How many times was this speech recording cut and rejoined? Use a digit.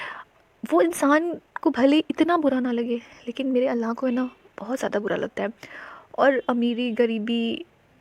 0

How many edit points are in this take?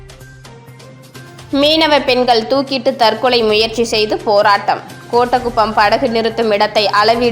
1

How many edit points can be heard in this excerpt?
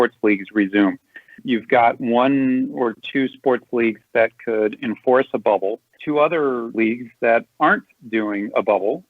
1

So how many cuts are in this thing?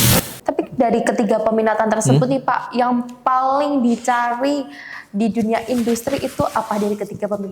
0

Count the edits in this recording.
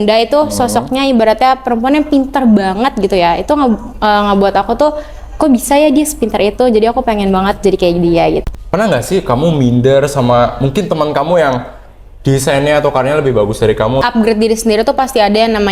2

